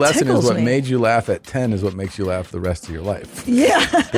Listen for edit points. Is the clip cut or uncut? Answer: uncut